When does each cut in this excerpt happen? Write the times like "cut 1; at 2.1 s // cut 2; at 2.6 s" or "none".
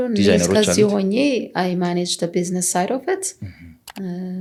none